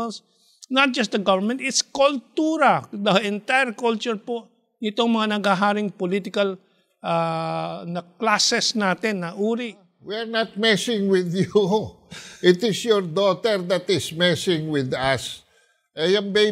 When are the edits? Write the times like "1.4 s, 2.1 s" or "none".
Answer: 10.2 s